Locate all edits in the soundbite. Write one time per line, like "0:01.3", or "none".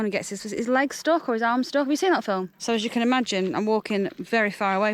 0:02.5